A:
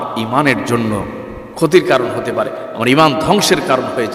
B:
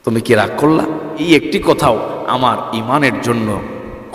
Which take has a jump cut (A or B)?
B